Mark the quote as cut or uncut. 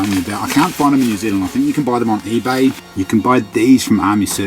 cut